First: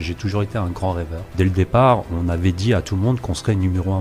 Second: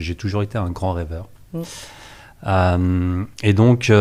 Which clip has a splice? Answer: first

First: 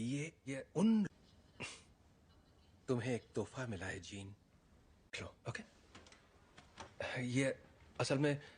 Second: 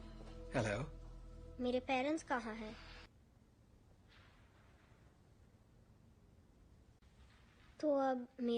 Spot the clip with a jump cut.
second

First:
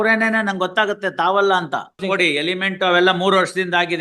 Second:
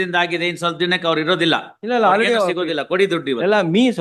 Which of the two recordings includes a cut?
first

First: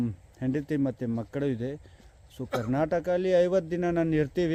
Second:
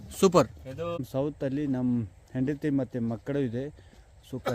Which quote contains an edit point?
second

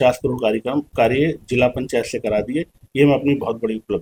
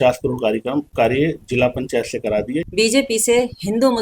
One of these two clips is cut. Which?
second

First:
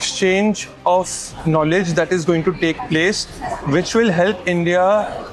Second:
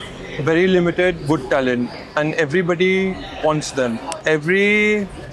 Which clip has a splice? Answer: second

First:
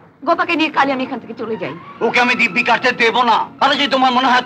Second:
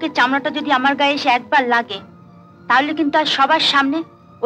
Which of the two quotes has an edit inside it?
first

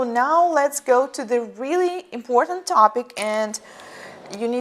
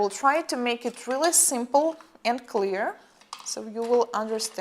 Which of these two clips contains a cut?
second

